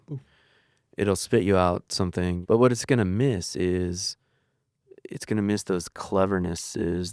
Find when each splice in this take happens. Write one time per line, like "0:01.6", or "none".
0:02.4